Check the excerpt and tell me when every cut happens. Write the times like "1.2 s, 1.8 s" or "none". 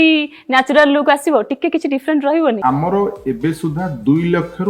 2.6 s